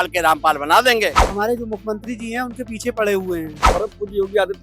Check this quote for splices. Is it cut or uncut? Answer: cut